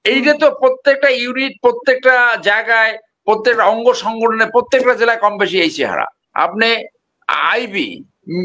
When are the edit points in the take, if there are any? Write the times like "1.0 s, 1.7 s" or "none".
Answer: 6.2 s

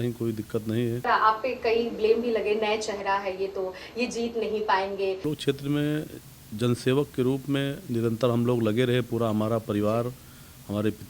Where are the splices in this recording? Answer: 1.0 s, 5.2 s

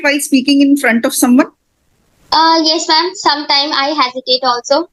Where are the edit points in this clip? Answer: none

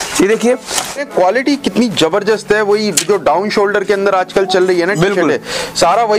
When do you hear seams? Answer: 0.9 s

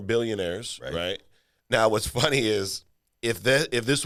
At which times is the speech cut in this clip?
none

